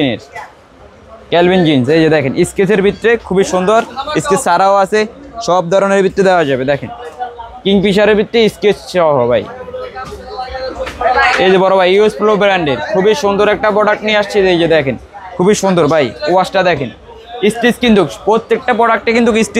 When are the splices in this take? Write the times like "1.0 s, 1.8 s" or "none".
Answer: none